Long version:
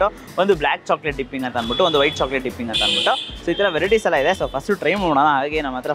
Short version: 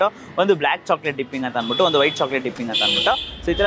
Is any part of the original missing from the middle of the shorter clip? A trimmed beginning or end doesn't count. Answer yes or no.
no